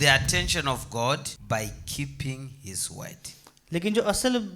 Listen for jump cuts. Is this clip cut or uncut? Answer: cut